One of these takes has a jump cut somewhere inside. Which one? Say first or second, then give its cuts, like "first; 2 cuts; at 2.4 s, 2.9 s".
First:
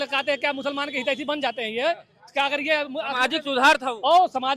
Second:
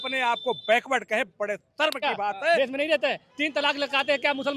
second; 1 cut; at 2.6 s